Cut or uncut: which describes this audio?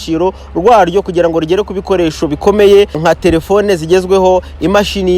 cut